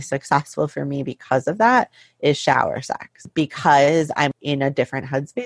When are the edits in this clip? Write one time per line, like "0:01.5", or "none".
0:03.2
0:04.3